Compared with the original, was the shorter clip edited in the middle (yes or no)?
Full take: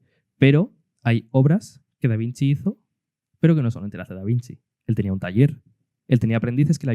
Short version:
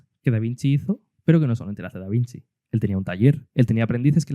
yes